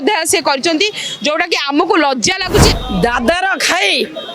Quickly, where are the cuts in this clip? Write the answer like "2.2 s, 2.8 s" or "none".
2.8 s